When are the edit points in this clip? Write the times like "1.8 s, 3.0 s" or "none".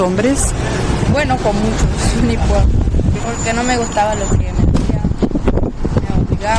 3.2 s